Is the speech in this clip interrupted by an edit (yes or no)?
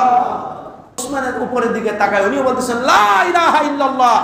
yes